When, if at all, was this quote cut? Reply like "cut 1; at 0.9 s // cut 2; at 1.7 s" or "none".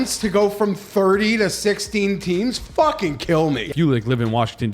cut 1; at 3.7 s

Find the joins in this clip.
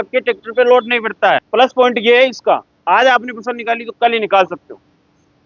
cut 1; at 1.5 s

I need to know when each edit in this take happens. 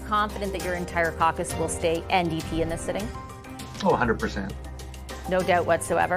none

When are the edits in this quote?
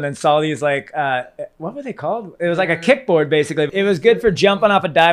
cut 1; at 3.8 s

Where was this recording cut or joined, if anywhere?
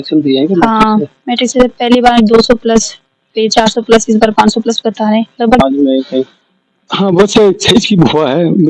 cut 1; at 5.6 s

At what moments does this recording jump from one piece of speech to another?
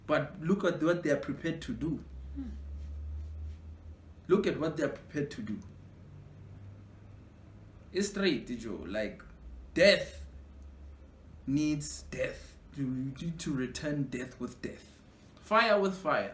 none

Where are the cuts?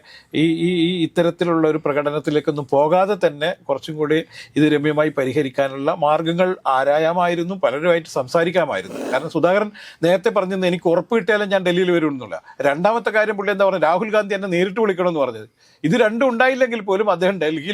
cut 1; at 9.0 s

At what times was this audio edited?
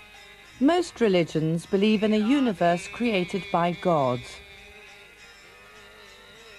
cut 1; at 5.0 s

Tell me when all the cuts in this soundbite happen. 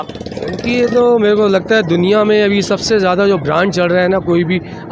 none

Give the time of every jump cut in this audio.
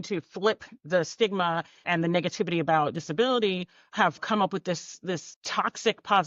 cut 1; at 1.9 s // cut 2; at 4.2 s // cut 3; at 5.4 s

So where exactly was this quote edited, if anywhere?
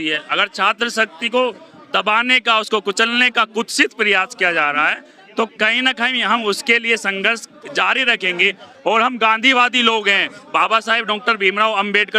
cut 1; at 5.5 s

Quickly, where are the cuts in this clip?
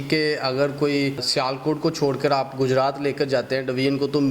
cut 1; at 1.3 s

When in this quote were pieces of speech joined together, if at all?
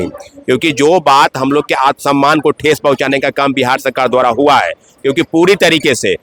none

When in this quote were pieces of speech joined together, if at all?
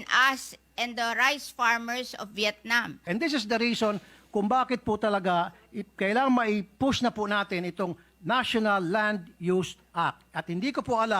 cut 1; at 3.0 s

